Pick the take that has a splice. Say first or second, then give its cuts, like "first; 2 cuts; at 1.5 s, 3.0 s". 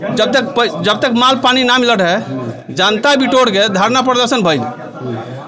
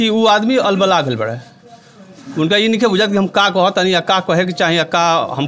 first; 1 cut; at 2.5 s